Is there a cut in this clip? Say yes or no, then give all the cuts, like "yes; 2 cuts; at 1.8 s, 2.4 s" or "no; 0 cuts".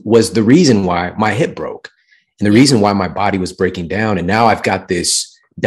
no; 0 cuts